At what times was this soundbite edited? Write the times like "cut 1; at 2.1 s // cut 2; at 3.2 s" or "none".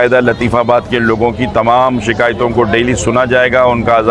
none